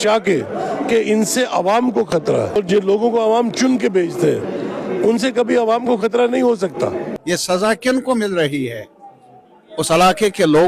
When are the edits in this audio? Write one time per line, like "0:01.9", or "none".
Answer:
0:02.6
0:07.1